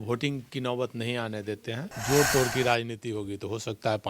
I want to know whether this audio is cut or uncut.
cut